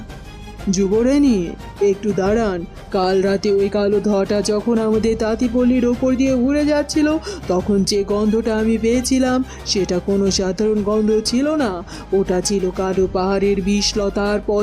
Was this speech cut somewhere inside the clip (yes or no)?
no